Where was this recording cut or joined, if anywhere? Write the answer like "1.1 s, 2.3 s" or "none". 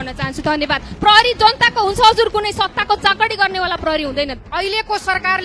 4.3 s